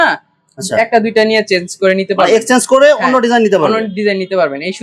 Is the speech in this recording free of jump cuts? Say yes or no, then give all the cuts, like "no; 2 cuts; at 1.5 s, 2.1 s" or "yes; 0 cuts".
yes; 0 cuts